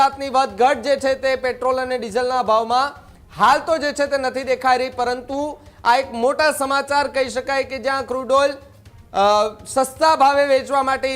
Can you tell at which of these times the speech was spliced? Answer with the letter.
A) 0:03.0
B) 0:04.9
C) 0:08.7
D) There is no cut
D